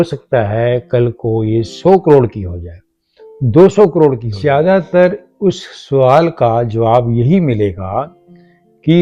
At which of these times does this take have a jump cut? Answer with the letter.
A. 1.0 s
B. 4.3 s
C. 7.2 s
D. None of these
B